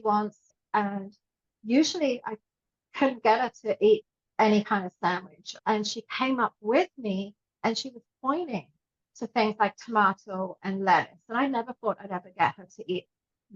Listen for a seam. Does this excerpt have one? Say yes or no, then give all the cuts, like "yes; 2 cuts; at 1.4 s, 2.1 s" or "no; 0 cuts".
no; 0 cuts